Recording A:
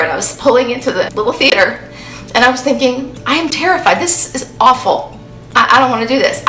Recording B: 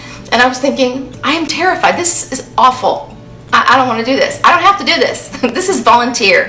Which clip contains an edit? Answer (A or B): A